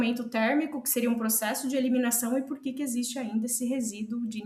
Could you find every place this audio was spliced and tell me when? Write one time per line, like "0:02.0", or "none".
none